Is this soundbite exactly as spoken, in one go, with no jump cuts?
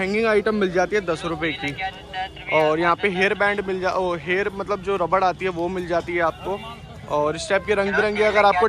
yes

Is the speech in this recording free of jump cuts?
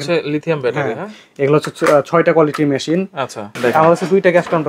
no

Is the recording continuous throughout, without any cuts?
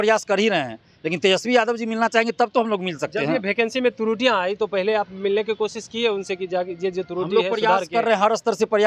yes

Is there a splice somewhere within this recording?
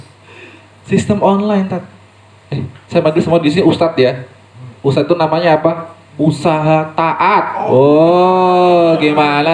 no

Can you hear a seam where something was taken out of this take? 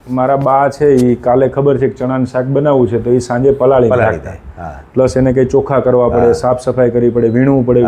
no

